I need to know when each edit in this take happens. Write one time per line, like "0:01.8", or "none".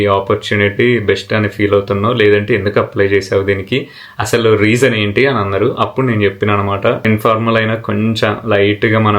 0:07.0